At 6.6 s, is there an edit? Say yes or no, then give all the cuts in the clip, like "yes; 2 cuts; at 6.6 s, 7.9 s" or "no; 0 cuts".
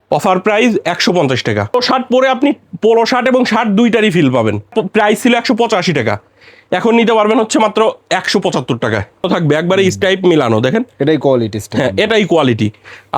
no; 3 cuts; at 1.8 s, 4.7 s, 9.3 s